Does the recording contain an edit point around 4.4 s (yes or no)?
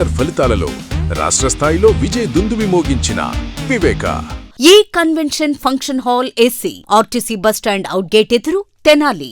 yes